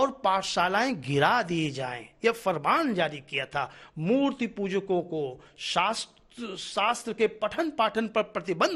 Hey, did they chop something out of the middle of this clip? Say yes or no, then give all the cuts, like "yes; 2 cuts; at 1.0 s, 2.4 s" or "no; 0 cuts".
no; 0 cuts